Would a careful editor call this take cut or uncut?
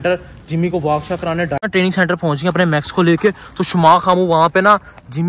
cut